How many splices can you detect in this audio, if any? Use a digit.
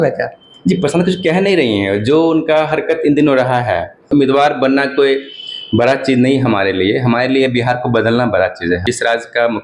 2